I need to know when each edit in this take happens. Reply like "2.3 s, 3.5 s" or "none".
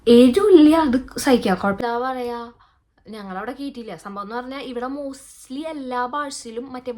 1.8 s